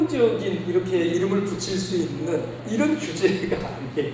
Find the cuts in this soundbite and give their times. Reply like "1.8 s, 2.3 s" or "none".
2.6 s